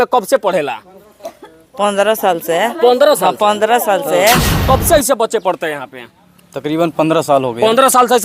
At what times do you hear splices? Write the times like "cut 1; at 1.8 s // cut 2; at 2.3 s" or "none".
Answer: cut 1; at 4.5 s